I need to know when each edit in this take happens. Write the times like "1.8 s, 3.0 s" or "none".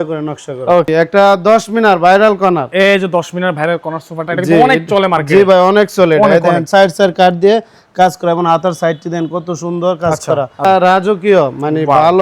0.9 s, 10.6 s

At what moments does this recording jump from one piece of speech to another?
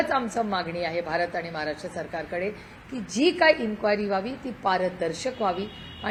none

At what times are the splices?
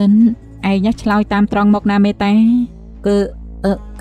2.8 s

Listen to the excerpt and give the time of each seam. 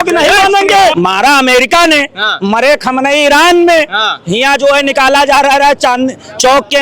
0.9 s

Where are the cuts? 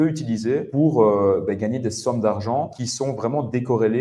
2.8 s

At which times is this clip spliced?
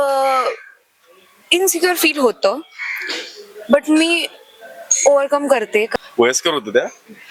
5.9 s

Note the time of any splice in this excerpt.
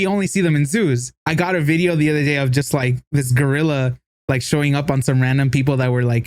1.1 s

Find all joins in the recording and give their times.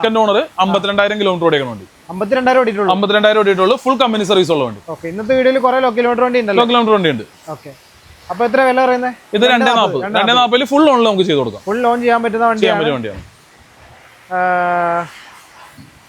none

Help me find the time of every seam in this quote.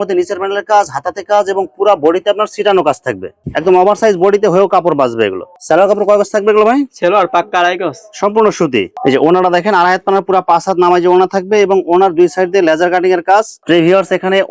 none

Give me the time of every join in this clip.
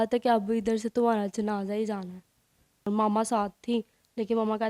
2.9 s

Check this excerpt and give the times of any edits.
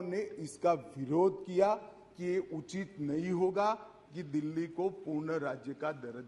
none

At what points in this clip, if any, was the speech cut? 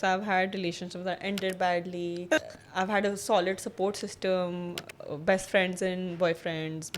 2.4 s

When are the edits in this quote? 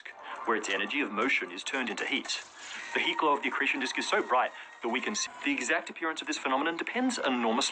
5.2 s

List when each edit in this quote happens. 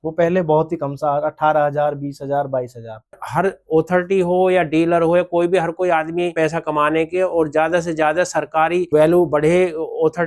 3.2 s, 6.3 s, 8.9 s

